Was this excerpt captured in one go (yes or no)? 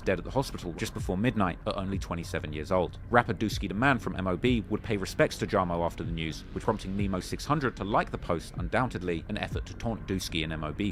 yes